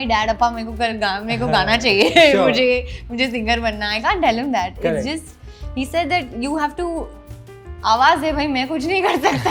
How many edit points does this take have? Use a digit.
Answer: 0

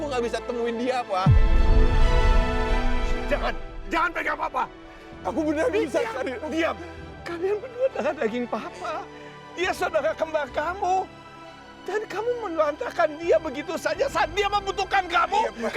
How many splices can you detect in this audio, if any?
0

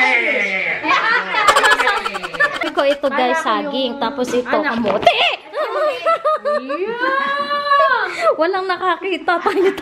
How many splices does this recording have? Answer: 1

